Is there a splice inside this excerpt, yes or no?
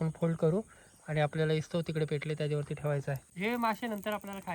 yes